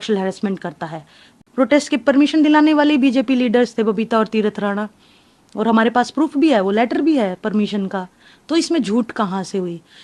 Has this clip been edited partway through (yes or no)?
yes